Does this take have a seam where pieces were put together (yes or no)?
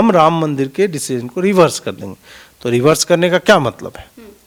no